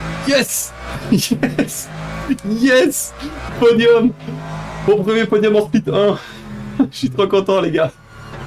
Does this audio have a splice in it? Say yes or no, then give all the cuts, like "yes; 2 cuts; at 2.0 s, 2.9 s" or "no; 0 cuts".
no; 0 cuts